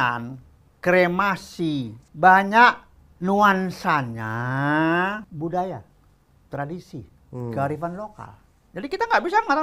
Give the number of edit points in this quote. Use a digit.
2